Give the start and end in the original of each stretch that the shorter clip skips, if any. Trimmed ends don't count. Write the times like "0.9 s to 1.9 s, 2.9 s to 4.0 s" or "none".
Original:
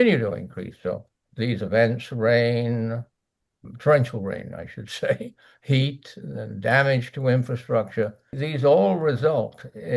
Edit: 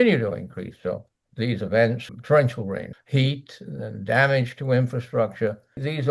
2.1 s to 3.6 s, 4.5 s to 5.5 s